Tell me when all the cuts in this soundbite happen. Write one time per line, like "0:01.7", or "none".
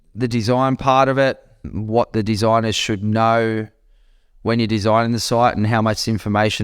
0:01.6